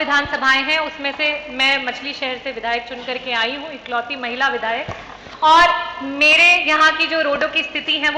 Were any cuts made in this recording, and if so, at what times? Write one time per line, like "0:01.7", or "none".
none